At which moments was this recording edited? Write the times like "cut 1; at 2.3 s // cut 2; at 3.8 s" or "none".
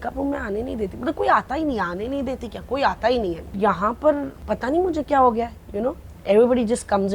cut 1; at 3.5 s // cut 2; at 4.4 s

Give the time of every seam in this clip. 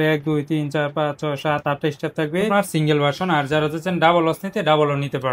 cut 1; at 2.5 s

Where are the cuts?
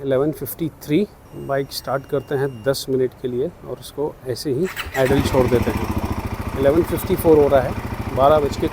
cut 1; at 1.3 s

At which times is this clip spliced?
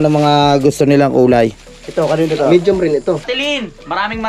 cut 1; at 3.2 s

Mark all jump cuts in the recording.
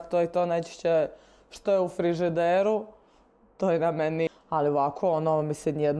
cut 1; at 4.3 s

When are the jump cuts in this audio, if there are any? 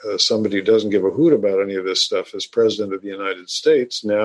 none

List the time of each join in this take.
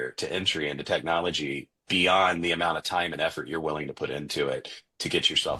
none

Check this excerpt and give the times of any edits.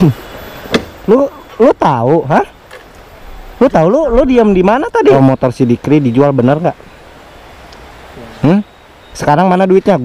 cut 1; at 5.2 s

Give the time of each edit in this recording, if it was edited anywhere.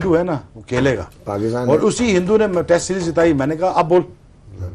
none

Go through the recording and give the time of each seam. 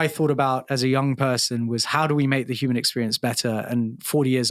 none

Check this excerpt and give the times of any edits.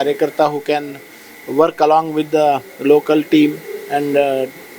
none

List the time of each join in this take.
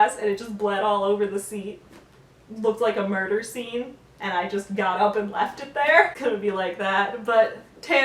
cut 1; at 6.1 s

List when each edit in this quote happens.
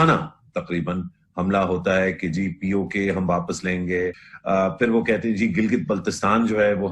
cut 1; at 4.3 s

